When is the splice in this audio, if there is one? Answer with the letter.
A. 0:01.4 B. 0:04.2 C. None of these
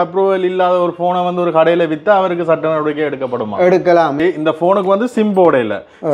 B